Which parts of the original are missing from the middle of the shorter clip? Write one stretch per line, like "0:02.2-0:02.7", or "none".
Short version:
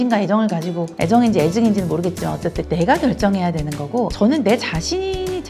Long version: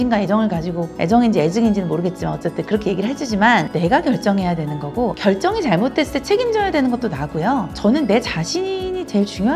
0:02.6-0:03.7
0:05.2-0:07.8